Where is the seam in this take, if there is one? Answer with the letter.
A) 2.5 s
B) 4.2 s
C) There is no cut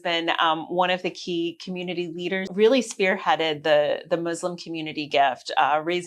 A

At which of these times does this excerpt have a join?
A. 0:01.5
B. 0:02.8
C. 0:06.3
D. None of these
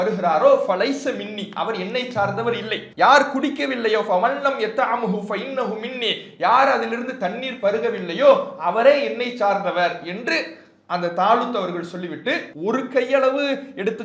B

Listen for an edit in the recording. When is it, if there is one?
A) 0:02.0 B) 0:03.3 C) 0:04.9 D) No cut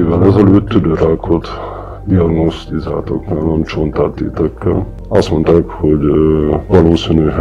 C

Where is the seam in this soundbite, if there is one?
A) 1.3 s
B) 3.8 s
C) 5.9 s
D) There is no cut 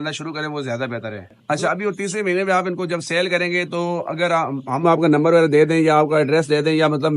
A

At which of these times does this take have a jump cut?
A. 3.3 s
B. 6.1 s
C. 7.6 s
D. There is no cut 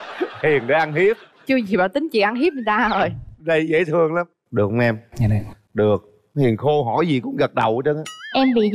D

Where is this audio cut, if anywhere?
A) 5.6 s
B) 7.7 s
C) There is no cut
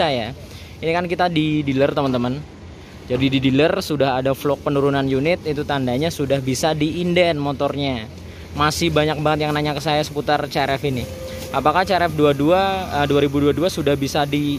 C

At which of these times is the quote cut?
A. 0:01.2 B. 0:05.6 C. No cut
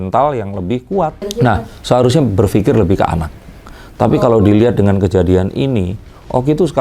A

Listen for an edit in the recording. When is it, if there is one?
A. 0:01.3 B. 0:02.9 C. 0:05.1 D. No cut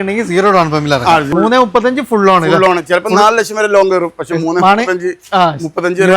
A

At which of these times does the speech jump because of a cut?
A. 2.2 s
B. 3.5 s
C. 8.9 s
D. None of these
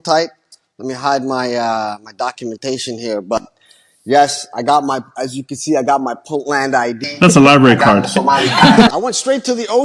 C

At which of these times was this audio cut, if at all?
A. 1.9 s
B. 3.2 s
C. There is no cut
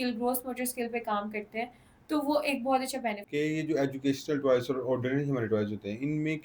B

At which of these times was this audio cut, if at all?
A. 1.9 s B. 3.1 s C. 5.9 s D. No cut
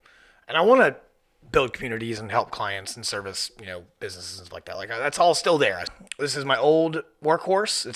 C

